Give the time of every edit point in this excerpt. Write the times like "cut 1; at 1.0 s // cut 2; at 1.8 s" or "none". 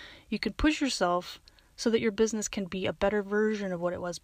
none